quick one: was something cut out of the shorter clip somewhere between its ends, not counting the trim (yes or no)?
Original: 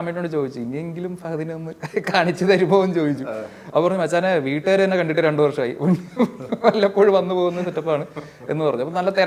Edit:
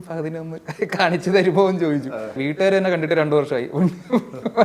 yes